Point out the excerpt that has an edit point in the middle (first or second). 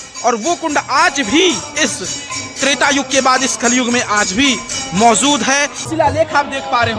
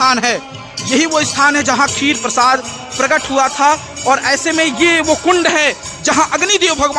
first